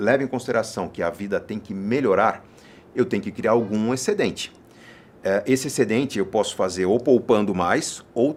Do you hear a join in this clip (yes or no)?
no